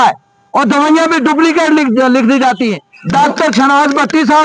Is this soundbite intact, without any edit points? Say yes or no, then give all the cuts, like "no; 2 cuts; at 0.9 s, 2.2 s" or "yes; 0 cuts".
no; 1 cut; at 2.9 s